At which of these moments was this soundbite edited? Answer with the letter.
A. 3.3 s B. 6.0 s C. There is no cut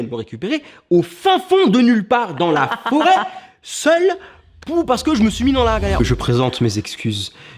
B